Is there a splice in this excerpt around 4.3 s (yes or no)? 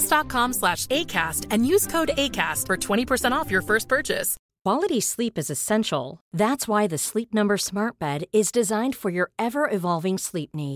yes